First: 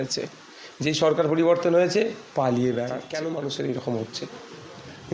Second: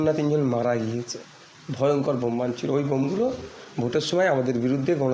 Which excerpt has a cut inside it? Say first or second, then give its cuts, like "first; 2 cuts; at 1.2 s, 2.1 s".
first; 1 cut; at 3.0 s